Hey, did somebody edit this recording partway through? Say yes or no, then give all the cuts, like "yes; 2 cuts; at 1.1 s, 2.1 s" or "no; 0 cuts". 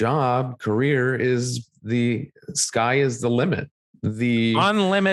no; 0 cuts